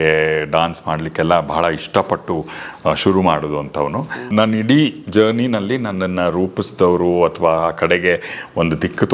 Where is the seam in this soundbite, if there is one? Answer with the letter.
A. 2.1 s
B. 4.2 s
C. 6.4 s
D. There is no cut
B